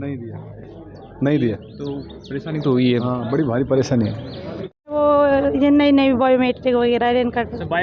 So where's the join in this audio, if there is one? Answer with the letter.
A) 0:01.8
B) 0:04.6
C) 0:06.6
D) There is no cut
B